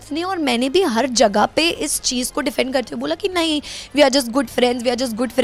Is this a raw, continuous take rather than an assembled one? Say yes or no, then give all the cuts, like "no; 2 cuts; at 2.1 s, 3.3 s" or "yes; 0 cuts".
yes; 0 cuts